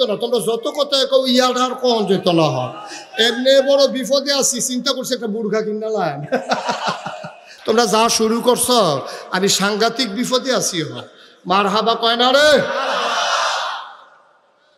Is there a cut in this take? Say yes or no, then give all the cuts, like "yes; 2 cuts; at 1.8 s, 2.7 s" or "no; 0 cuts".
no; 0 cuts